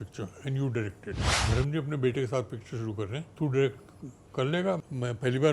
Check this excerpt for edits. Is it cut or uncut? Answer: cut